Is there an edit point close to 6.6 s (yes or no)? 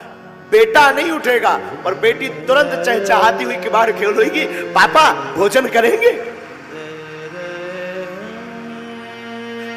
no